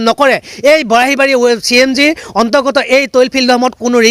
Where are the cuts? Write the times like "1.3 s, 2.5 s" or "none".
none